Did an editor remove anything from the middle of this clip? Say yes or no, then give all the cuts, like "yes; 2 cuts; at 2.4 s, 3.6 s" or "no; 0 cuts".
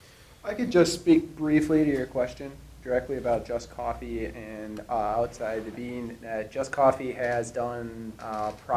yes; 1 cut; at 3.2 s